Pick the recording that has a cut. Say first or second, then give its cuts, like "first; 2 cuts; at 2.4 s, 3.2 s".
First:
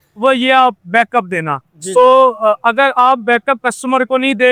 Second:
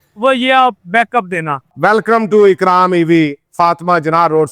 second; 1 cut; at 1.6 s